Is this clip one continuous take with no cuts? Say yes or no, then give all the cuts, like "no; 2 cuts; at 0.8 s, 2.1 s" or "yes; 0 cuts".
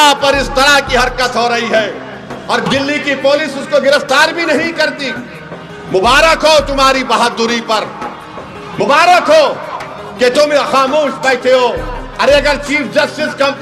yes; 0 cuts